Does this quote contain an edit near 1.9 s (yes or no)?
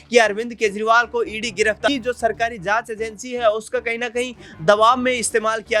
yes